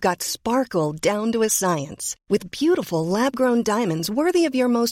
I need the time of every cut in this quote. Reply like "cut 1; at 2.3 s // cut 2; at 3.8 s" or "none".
none

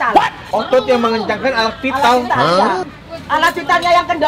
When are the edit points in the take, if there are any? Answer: none

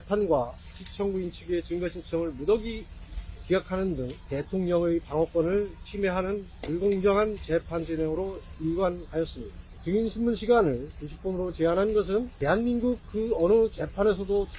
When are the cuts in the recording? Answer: cut 1; at 4.2 s // cut 2; at 9.7 s // cut 3; at 12.3 s

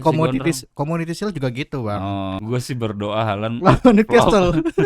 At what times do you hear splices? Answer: cut 1; at 2.4 s

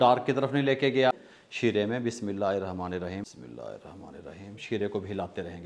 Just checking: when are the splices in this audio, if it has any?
cut 1; at 1.1 s // cut 2; at 3.3 s

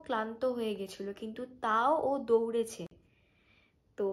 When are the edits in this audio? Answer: none

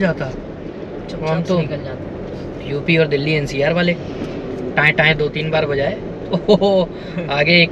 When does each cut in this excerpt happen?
none

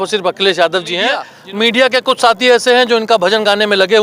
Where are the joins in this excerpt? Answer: cut 1; at 1.3 s

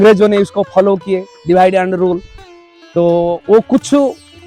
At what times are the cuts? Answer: none

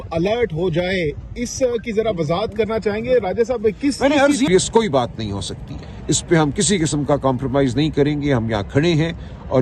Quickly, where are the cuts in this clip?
cut 1; at 4.5 s

